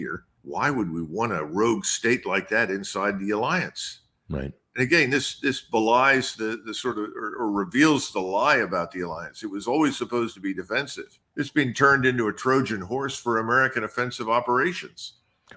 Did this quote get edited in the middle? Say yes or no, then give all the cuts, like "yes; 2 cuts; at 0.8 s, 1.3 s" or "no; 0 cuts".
no; 0 cuts